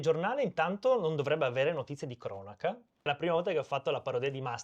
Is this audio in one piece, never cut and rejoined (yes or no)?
no